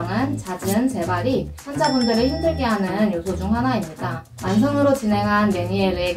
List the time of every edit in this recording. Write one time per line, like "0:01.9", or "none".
0:04.3